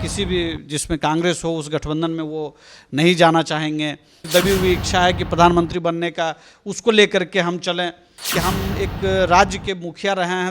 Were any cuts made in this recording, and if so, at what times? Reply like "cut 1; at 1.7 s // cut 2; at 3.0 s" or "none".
cut 1; at 4.2 s // cut 2; at 8.2 s

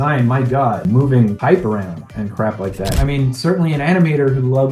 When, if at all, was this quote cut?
cut 1; at 0.9 s // cut 2; at 3.0 s

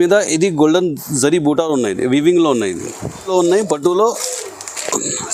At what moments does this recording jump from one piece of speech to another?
cut 1; at 3.3 s

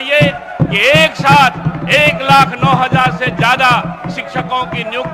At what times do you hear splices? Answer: none

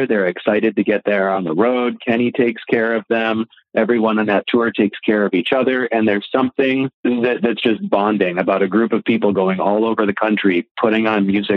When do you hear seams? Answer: cut 1; at 6.9 s

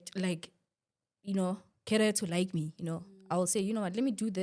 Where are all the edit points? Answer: none

